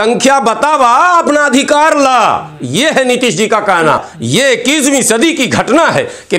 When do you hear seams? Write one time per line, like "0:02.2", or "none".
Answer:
0:04.1